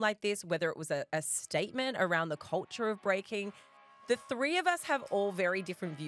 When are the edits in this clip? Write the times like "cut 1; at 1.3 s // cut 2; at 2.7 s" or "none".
cut 1; at 3.6 s